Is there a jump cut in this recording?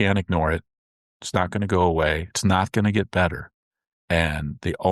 no; 0 cuts

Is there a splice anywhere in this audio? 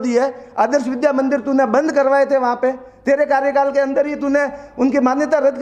no; 0 cuts

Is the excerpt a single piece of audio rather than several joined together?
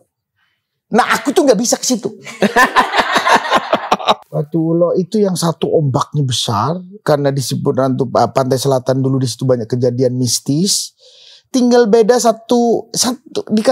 no; 1 cut; at 4.2 s

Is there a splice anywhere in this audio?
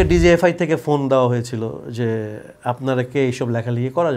no; 0 cuts

